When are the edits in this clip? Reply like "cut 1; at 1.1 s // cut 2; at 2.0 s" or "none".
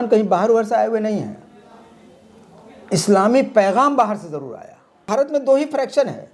cut 1; at 5.0 s